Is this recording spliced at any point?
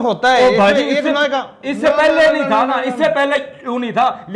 no; 0 cuts

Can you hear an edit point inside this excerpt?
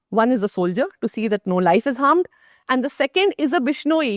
no; 0 cuts

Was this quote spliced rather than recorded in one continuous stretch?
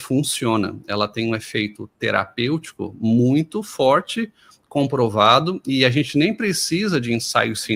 no; 0 cuts

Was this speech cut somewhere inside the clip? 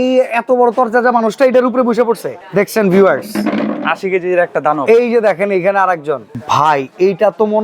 yes; 2 cuts; at 2.3 s, 6.3 s

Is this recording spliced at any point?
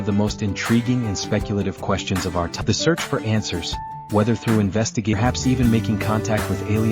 yes; 2 cuts; at 2.6 s, 5.1 s

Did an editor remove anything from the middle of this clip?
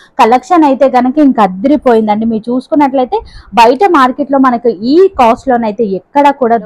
no; 0 cuts

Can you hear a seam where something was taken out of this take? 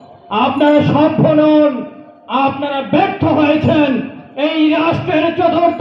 no; 0 cuts

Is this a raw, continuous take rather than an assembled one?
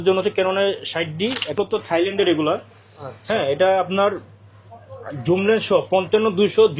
no; 1 cut; at 1.6 s

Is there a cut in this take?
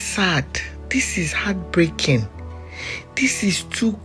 no; 0 cuts

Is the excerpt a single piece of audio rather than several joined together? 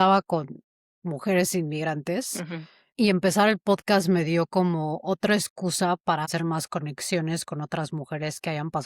no; 1 cut; at 6.3 s

